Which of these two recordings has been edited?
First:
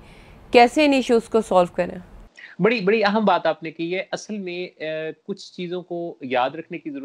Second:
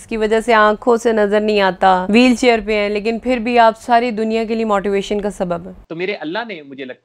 second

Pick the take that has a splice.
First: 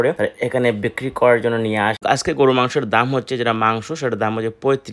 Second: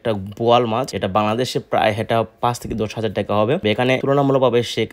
first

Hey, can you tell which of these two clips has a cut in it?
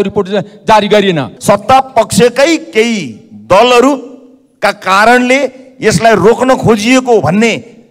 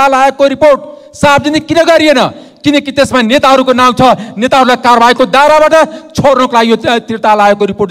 first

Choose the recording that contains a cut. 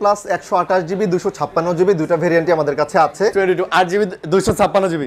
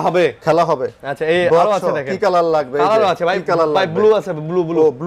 first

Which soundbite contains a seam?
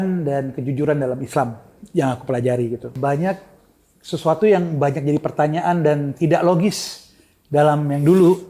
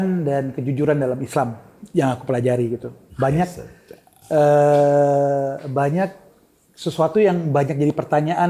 first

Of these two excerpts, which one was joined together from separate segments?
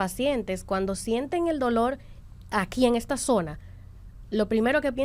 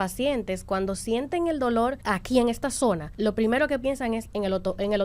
second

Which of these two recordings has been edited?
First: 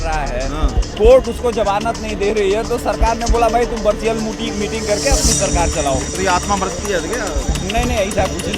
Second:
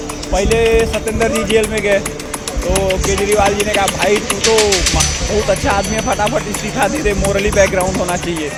first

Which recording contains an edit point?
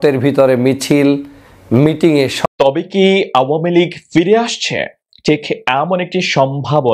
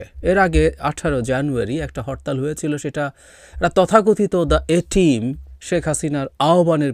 first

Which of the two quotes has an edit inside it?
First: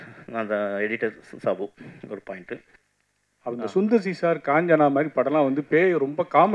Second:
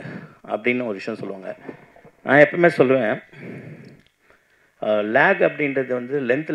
first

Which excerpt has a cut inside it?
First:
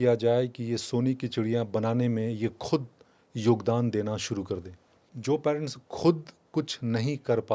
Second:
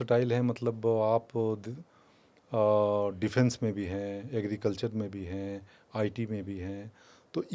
first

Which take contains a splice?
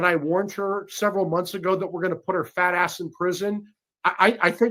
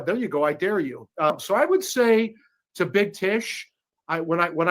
second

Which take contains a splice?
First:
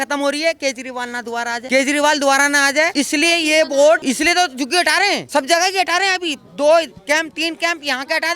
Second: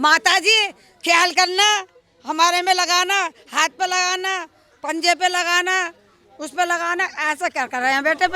first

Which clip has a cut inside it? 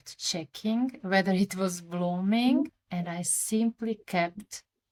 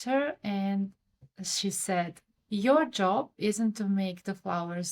second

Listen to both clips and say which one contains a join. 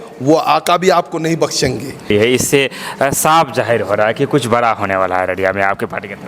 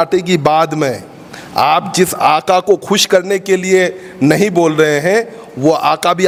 first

